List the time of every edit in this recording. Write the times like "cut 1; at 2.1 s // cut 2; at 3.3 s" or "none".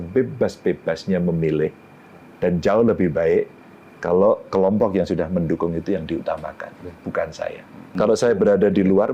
cut 1; at 7.9 s